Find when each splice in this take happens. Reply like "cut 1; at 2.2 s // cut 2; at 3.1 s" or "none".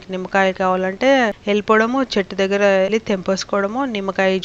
cut 1; at 1.4 s // cut 2; at 2.9 s